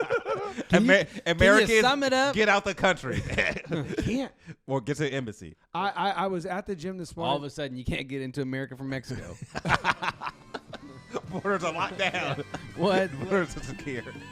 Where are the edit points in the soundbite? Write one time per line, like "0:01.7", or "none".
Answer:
none